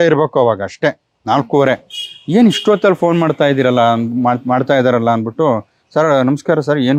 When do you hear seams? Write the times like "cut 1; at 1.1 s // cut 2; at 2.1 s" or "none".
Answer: none